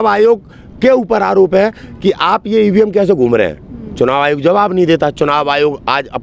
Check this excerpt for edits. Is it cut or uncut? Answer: uncut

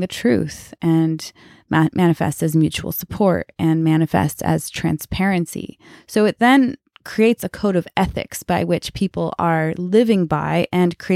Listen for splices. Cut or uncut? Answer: cut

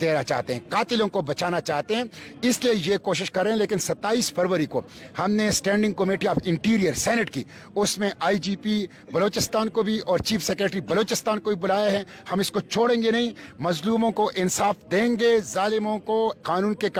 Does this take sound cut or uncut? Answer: uncut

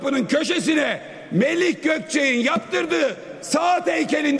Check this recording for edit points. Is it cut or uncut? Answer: uncut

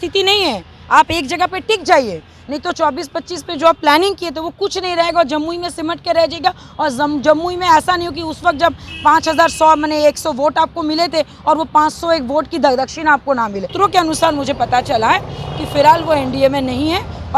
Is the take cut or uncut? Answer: cut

